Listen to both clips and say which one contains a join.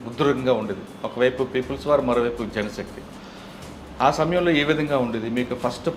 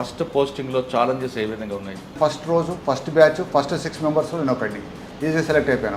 second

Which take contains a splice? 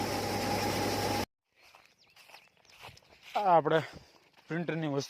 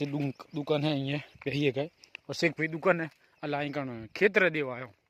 first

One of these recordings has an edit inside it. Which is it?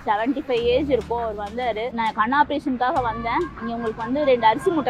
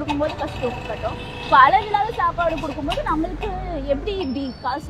first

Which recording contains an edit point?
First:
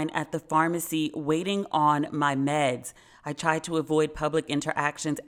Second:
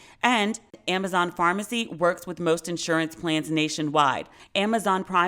second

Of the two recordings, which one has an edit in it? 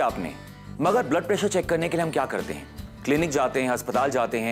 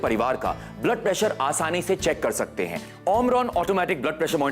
second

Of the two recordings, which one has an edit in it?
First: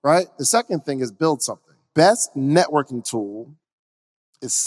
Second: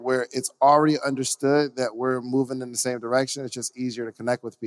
first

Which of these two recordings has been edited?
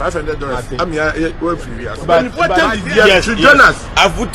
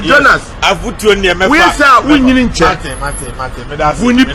first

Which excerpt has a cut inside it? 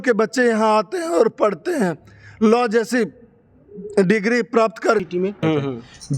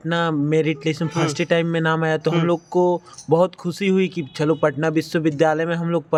first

